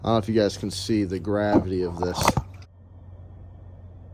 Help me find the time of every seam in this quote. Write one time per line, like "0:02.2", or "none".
none